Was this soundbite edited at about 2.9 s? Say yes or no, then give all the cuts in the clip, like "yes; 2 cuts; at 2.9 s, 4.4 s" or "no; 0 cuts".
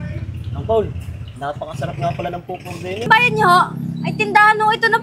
yes; 1 cut; at 2.9 s